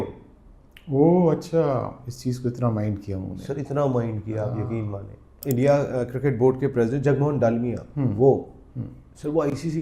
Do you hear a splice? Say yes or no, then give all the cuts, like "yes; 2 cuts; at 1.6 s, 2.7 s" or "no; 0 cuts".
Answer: yes; 1 cut; at 5.4 s